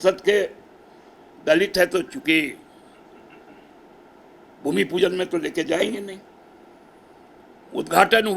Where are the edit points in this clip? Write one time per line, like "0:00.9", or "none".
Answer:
0:07.4